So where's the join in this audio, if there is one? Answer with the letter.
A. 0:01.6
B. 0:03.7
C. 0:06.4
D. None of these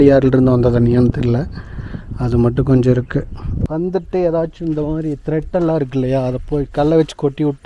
B